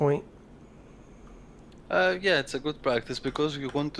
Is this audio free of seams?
no; 1 cut; at 2.8 s

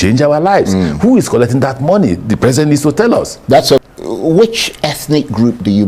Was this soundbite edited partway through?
yes; 1 cut; at 3.8 s

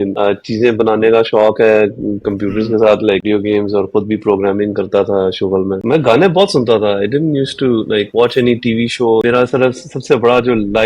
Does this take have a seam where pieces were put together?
yes; 3 cuts; at 3.2 s, 5.8 s, 9.2 s

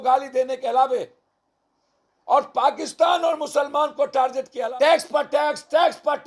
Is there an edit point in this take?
yes; 1 cut; at 4.7 s

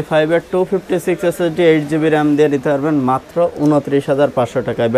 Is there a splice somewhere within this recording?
no; 0 cuts

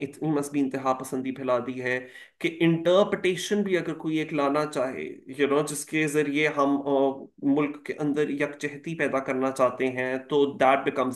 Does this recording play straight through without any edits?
yes; 0 cuts

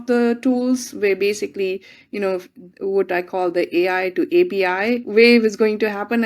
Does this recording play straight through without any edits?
no; 1 cut; at 5.0 s

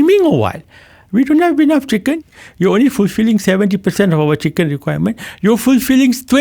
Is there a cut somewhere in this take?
yes; 1 cut; at 2.2 s

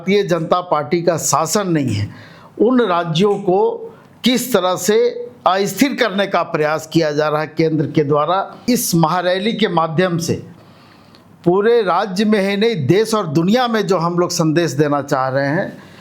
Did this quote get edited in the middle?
yes; 1 cut; at 8.6 s

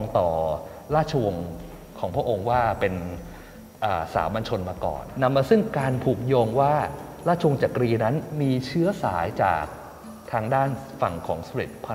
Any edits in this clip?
yes; 1 cut; at 5.1 s

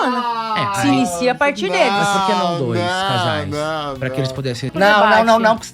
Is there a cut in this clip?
yes; 1 cut; at 4.7 s

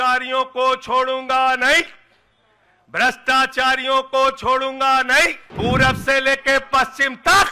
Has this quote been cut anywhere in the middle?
yes; 1 cut; at 5.4 s

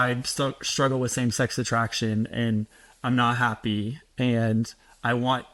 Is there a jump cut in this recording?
no; 0 cuts

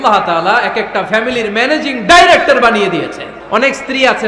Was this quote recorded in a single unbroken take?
no; 1 cut; at 3.3 s

